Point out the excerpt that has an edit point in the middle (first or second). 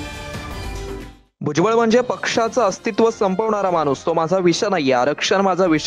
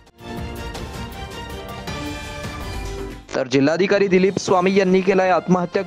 first